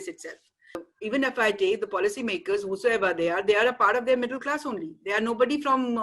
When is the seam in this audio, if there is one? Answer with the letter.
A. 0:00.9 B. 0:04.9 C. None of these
A